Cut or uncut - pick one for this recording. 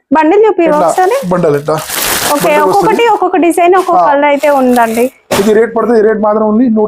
uncut